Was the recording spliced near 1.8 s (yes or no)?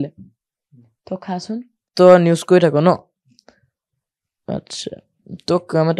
yes